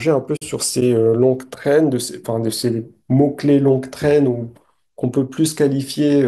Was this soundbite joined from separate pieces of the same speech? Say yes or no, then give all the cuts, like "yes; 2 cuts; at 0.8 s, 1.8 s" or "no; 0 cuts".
no; 0 cuts